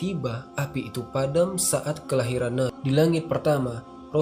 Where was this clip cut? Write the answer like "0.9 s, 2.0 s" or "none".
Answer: 2.8 s